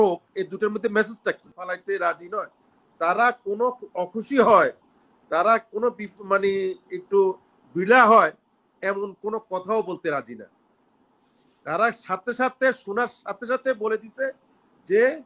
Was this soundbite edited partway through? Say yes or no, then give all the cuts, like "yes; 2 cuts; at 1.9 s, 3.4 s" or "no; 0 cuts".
yes; 1 cut; at 1.7 s